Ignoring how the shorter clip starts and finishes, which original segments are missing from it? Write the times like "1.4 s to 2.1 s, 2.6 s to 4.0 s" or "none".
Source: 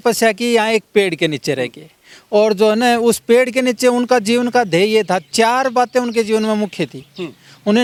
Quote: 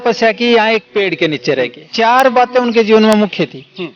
1.9 s to 5.3 s